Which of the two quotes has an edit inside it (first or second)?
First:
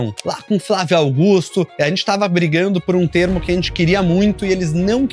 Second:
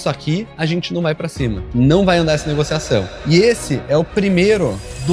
second